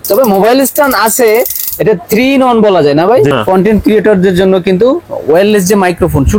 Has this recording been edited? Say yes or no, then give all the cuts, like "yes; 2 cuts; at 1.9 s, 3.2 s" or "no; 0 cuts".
yes; 1 cut; at 3.3 s